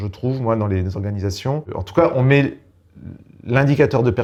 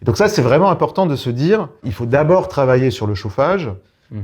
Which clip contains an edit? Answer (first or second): second